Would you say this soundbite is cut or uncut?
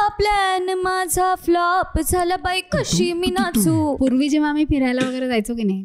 cut